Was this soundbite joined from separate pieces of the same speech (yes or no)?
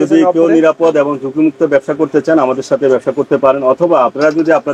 no